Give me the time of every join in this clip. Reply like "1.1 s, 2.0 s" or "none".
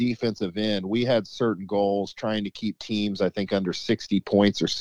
none